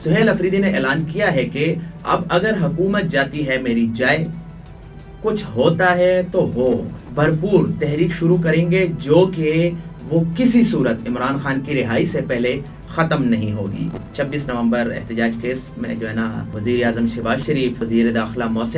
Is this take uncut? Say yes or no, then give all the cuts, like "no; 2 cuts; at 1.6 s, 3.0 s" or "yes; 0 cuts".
no; 4 cuts; at 7.0 s, 14.0 s, 16.5 s, 17.8 s